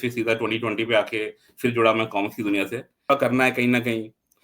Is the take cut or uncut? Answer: cut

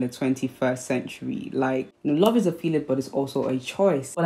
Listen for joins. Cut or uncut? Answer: cut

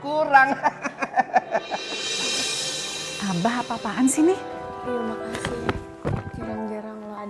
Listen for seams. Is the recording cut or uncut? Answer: cut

